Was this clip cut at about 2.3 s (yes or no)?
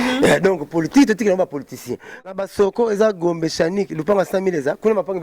yes